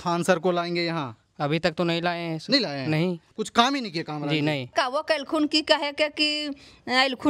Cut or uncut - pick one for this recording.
cut